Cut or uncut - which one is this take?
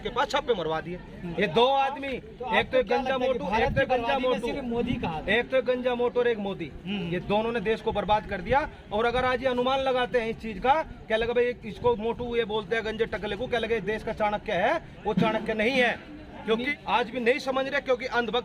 cut